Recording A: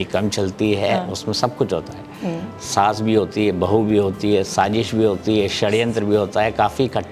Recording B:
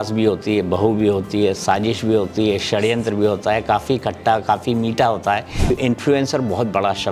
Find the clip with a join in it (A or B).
B